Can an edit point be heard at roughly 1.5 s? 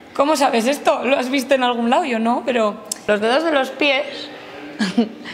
no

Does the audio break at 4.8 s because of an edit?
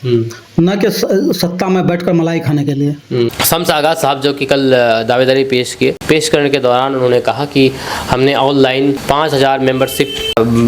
no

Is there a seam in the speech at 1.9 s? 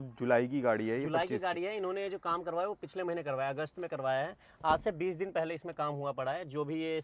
no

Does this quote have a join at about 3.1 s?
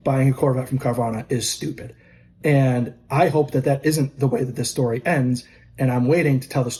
no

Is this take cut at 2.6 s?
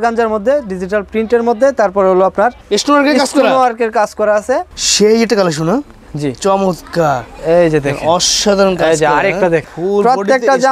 no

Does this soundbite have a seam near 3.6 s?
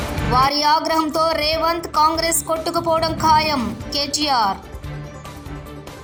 no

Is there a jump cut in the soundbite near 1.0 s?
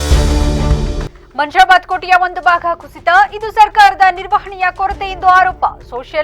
yes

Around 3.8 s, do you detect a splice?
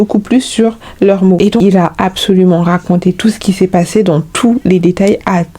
no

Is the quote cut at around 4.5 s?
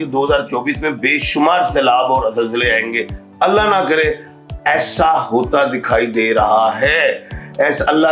no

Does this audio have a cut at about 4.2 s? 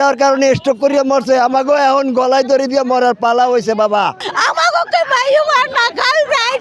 yes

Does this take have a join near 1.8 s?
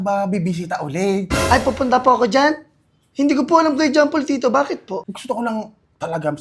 no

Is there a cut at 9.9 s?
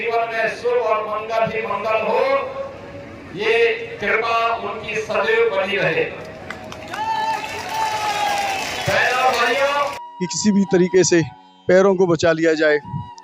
yes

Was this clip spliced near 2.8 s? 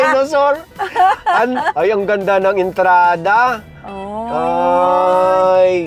no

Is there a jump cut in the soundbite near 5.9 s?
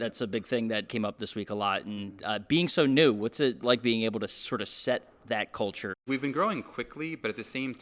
yes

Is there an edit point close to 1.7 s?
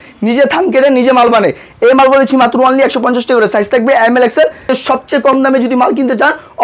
no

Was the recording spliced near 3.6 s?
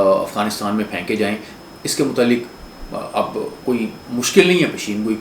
no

